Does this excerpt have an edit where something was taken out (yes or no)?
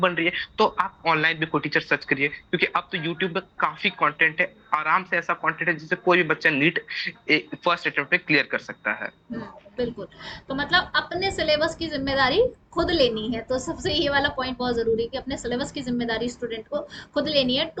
no